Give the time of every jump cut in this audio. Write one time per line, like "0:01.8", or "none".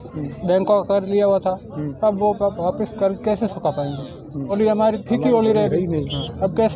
0:04.5